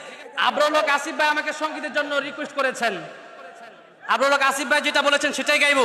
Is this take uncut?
yes; 0 cuts

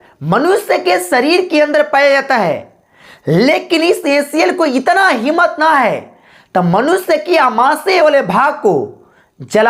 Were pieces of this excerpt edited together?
no; 0 cuts

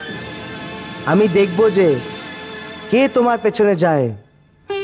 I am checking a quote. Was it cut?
no; 0 cuts

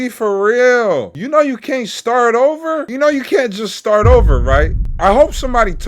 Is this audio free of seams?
no; 3 cuts; at 1.1 s, 2.9 s, 4.8 s

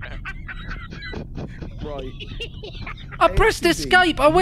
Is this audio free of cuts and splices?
yes; 0 cuts

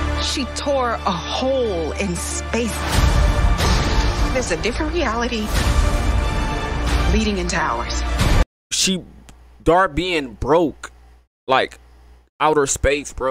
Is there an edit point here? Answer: yes; 1 cut; at 8.4 s

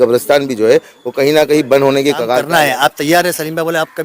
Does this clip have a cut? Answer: yes; 1 cut; at 2.4 s

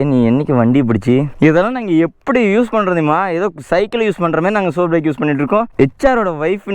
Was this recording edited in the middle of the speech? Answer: yes; 2 cuts; at 1.3 s, 5.7 s

